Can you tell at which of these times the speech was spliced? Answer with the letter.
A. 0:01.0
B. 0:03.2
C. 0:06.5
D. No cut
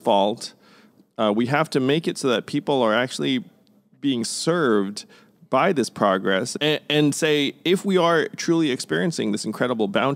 C